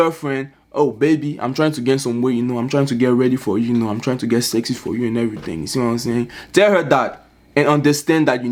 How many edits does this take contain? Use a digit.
0